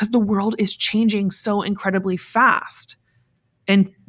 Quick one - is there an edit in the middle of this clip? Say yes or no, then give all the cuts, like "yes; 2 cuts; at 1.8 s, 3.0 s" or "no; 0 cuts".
no; 0 cuts